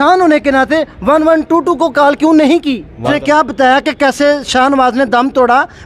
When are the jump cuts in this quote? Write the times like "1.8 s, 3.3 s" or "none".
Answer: 3.1 s